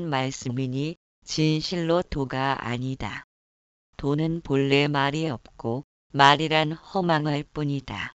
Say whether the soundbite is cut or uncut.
cut